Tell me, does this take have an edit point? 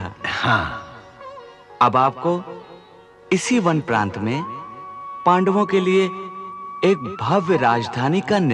no; 0 cuts

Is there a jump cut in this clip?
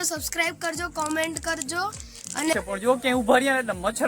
yes; 1 cut; at 2.5 s

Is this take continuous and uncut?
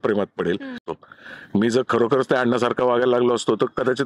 no; 1 cut; at 0.9 s

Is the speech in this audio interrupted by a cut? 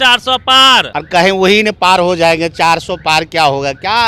yes; 1 cut; at 0.9 s

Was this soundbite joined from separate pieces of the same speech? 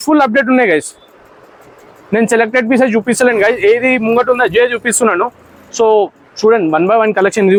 no; 0 cuts

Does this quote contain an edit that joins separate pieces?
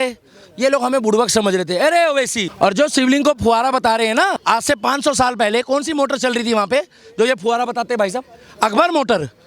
yes; 2 cuts; at 2.4 s, 4.4 s

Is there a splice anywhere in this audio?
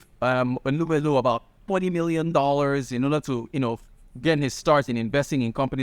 no; 0 cuts

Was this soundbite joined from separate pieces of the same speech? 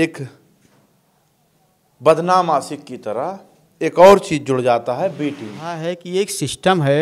yes; 1 cut; at 5.9 s

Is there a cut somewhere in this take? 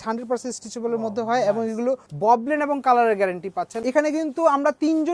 yes; 2 cuts; at 2.1 s, 3.7 s

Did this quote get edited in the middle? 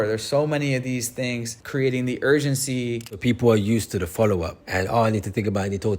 yes; 3 cuts; at 1.6 s, 3.2 s, 4.6 s

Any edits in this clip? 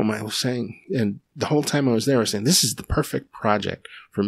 no; 0 cuts

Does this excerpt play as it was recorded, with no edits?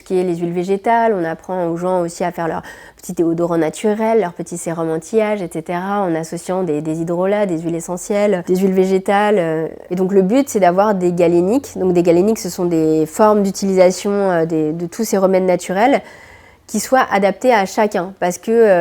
yes; 0 cuts

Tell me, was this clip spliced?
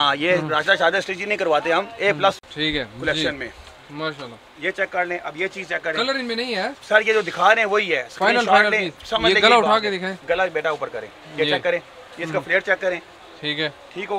no; 0 cuts

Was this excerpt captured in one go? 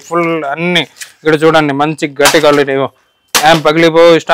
yes; 0 cuts

